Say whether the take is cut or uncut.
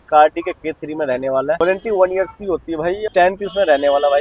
cut